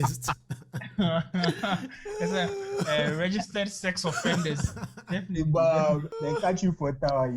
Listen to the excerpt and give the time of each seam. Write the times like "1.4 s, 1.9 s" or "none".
6.1 s